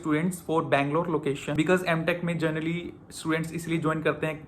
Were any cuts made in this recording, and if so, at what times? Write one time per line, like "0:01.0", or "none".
0:01.5